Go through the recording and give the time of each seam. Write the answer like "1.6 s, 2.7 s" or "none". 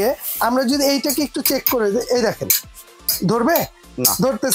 none